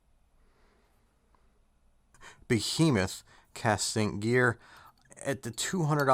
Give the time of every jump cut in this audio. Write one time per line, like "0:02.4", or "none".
0:02.3